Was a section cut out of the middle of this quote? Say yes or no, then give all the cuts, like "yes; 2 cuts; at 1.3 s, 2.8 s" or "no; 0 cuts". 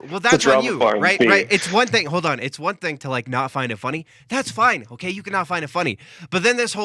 no; 0 cuts